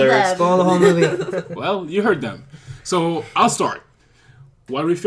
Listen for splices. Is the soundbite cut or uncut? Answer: cut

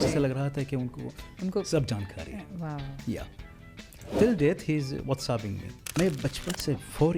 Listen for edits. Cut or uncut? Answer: cut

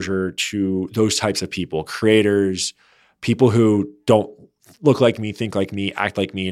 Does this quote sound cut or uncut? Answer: uncut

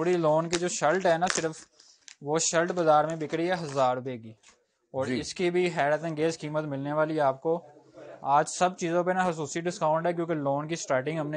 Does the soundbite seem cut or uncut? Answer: uncut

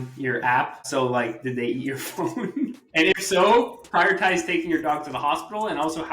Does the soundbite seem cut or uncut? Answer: cut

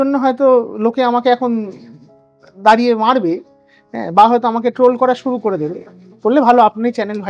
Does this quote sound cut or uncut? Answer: uncut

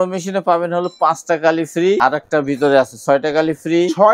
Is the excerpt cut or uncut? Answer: cut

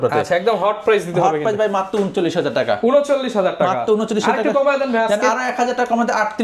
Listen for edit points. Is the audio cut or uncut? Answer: uncut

